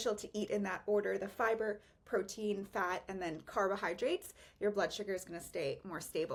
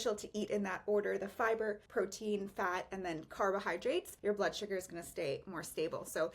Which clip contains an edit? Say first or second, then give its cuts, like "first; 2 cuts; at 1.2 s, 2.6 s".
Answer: second; 2 cuts; at 1.8 s, 4.1 s